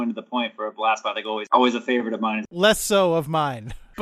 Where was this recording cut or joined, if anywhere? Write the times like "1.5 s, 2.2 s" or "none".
2.5 s